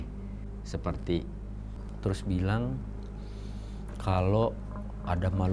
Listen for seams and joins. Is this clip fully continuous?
no; 1 cut; at 1.8 s

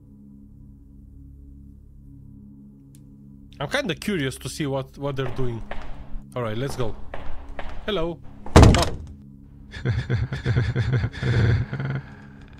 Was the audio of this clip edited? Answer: no; 0 cuts

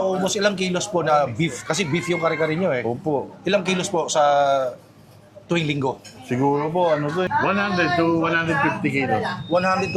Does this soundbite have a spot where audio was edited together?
yes; 1 cut; at 7.3 s

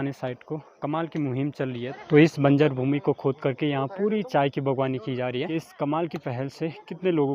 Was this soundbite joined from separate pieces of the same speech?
yes; 2 cuts; at 2.0 s, 5.5 s

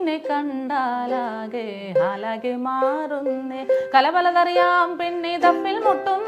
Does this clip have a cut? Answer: no; 0 cuts

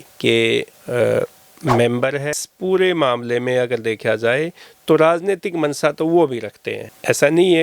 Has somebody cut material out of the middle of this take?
yes; 1 cut; at 2.4 s

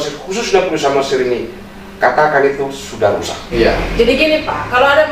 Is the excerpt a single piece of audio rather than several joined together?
no; 1 cut; at 3.4 s

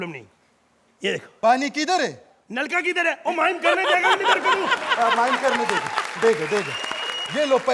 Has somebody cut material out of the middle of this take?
yes; 1 cut; at 1.3 s

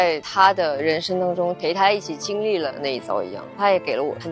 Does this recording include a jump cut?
no; 0 cuts

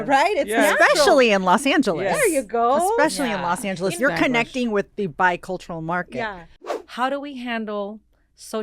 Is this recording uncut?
no; 1 cut; at 6.5 s

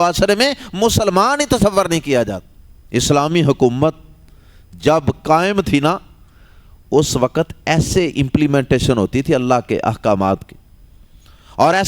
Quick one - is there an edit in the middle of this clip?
no; 0 cuts

